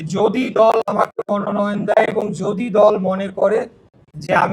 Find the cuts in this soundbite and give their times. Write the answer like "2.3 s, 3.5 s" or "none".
none